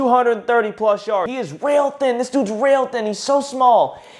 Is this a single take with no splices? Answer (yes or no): no